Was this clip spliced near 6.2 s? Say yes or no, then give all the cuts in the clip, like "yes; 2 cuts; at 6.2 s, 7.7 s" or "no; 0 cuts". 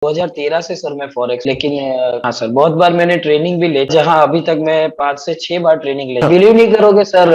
yes; 3 cuts; at 1.4 s, 3.9 s, 6.2 s